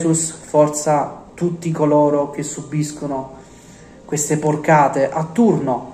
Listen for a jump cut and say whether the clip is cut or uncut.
uncut